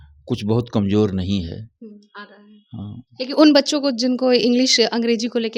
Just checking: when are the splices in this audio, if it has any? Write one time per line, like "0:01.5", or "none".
none